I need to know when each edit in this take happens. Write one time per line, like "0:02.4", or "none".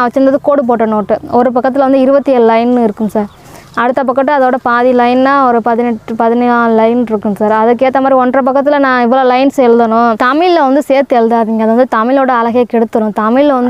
0:10.2